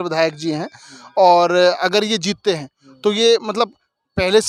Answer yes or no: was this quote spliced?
no